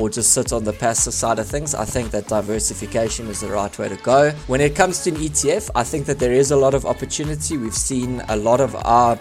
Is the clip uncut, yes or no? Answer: yes